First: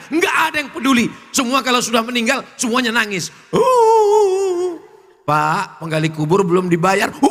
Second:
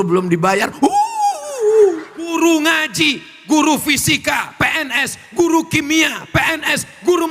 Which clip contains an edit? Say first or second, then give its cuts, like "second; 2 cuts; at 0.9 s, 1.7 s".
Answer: second; 1 cut; at 2.3 s